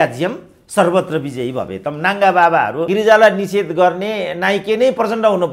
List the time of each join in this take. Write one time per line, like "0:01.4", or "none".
0:02.9